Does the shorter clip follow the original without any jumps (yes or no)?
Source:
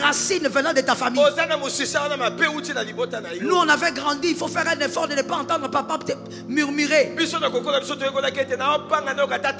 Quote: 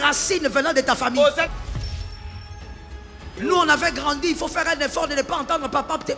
yes